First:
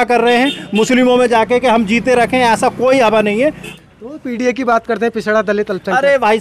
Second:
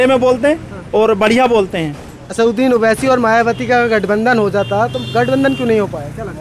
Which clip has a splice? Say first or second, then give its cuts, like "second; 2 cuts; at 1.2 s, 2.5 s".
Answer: first; 1 cut; at 3.7 s